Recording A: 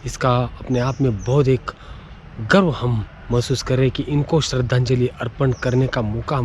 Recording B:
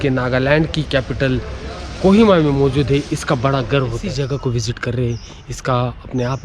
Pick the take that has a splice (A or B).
B